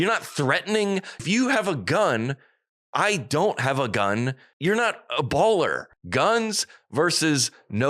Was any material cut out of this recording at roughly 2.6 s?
no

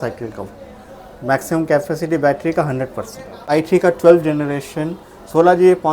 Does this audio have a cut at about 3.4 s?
yes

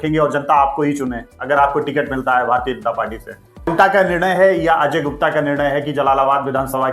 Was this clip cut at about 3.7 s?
yes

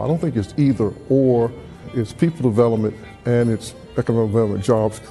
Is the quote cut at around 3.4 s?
no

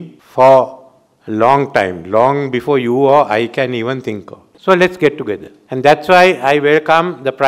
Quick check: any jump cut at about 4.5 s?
yes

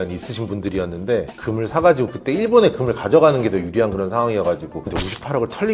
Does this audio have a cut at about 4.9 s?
yes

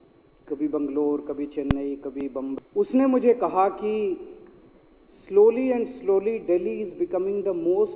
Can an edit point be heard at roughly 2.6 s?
yes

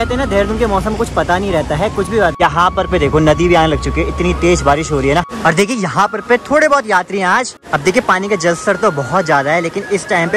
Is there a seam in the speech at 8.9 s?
no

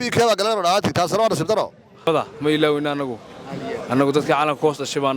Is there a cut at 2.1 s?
yes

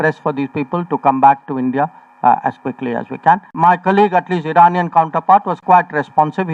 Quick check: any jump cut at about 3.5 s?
yes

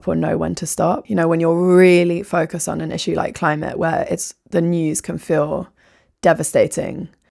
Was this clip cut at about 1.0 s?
yes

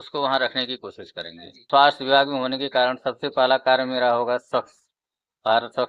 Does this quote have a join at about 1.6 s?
yes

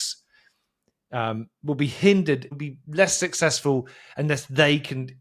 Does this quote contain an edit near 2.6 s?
yes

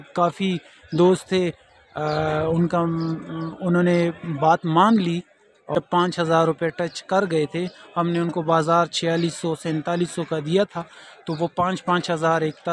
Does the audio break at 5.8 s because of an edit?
yes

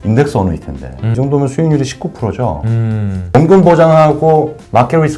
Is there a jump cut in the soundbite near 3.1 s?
no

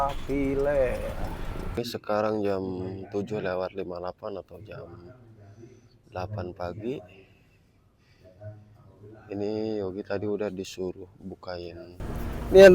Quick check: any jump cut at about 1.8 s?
yes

